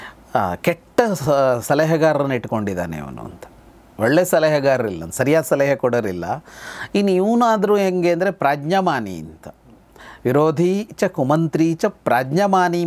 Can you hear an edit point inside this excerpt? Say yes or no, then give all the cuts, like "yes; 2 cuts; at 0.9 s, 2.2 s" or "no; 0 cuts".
no; 0 cuts